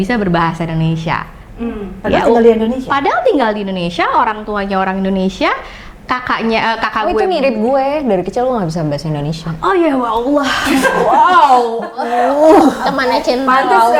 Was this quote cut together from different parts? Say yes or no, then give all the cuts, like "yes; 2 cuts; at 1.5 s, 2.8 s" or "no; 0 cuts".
no; 0 cuts